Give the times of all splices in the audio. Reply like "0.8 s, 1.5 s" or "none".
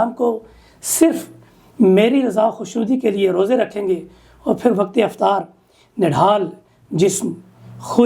none